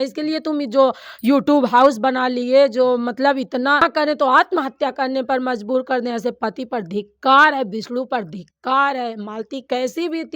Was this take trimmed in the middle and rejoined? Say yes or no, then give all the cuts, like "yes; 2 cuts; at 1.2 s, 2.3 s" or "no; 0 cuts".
yes; 1 cut; at 3.8 s